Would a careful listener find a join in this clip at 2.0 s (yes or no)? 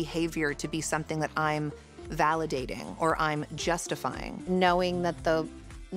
no